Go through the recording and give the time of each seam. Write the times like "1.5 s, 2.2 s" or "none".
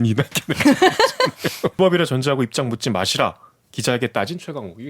1.8 s